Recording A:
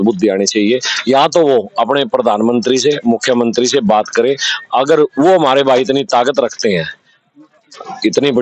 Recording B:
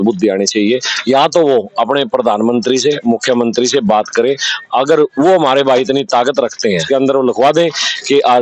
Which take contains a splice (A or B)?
B